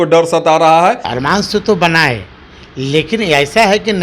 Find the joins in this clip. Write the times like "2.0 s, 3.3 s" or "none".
1.1 s